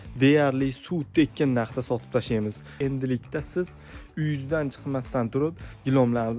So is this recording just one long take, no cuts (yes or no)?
no